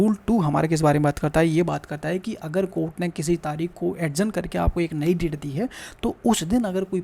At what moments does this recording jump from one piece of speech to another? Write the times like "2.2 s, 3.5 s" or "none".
none